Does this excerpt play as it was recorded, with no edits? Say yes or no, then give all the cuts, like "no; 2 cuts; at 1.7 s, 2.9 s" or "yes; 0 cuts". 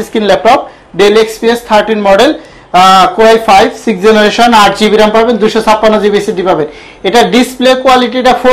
yes; 0 cuts